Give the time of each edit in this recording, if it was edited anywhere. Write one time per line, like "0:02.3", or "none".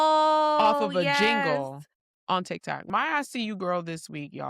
0:02.9